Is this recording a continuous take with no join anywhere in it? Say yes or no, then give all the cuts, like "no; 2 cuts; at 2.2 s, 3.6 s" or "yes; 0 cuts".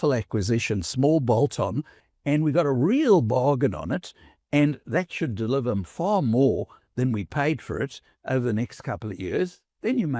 no; 1 cut; at 2.0 s